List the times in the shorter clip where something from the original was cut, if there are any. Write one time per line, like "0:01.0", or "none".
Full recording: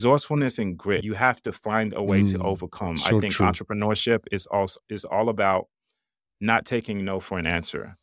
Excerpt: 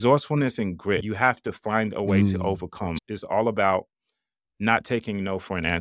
0:03.0